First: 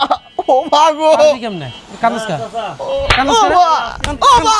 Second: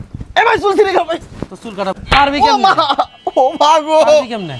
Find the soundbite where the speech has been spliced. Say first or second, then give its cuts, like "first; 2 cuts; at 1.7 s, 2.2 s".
second; 1 cut; at 2.0 s